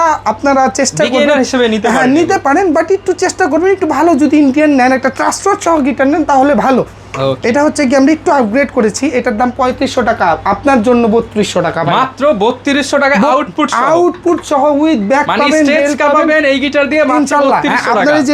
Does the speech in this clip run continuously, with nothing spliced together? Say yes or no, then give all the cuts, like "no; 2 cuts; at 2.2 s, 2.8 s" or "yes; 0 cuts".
yes; 0 cuts